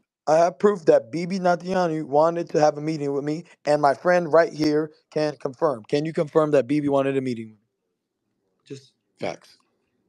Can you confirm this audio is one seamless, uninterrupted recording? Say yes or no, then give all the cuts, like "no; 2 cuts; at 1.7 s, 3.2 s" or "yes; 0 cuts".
yes; 0 cuts